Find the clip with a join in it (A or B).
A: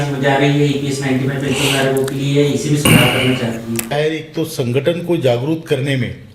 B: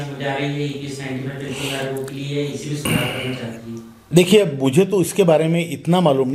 A